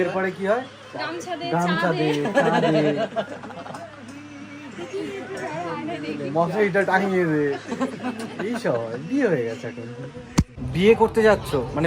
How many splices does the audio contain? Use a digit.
1